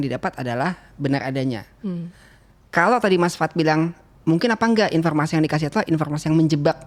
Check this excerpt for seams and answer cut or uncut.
uncut